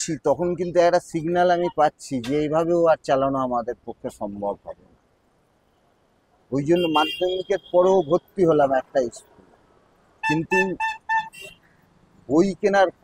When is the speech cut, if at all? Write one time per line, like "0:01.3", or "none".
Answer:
none